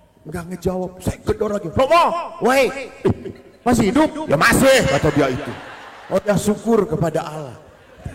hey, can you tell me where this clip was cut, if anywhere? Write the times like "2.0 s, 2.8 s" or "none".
none